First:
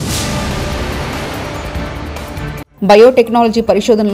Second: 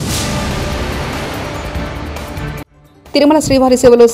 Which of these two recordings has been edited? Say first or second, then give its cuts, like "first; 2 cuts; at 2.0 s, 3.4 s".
first; 1 cut; at 2.7 s